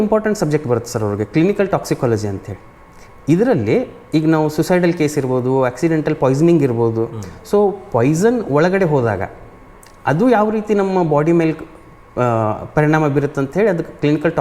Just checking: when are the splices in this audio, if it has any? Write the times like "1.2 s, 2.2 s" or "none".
none